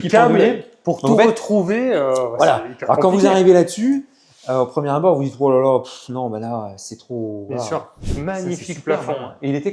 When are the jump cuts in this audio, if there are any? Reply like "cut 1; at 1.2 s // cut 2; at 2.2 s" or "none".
cut 1; at 7.9 s